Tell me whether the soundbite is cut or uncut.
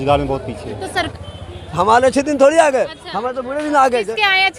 cut